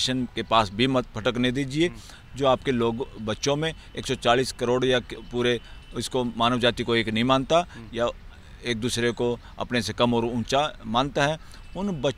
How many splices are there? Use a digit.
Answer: 0